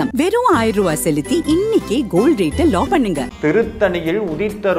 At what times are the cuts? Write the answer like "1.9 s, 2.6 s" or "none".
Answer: 3.2 s